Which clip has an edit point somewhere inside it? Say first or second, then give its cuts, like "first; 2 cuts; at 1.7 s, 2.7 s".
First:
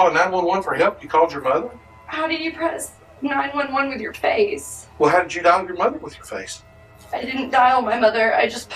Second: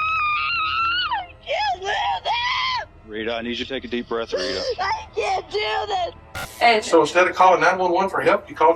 second; 1 cut; at 6.2 s